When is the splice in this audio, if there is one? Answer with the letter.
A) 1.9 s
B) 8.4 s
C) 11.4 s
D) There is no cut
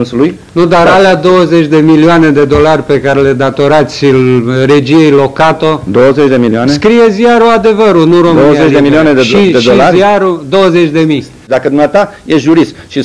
C